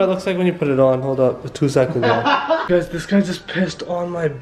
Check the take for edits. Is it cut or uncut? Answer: cut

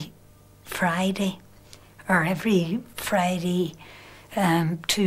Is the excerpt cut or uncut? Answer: uncut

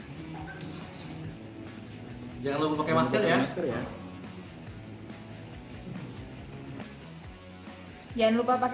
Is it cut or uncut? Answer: uncut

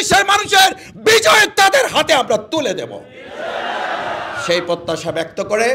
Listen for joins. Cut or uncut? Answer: uncut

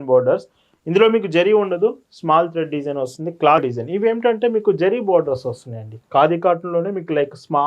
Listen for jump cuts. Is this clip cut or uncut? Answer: cut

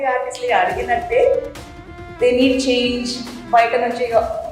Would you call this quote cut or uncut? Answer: uncut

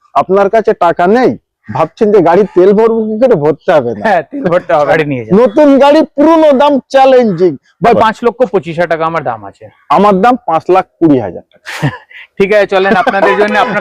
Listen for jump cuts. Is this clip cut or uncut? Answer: cut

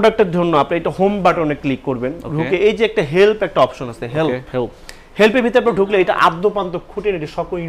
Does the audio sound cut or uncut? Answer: uncut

